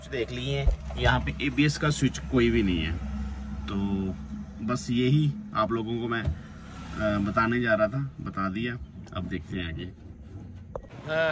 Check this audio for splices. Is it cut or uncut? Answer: uncut